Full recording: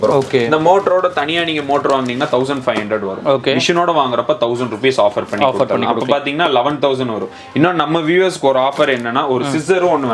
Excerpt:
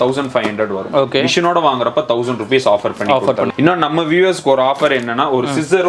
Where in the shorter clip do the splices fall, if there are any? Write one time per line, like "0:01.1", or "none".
0:03.5